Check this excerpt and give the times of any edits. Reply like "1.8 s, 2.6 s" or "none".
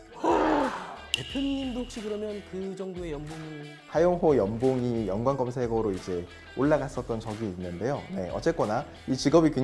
3.7 s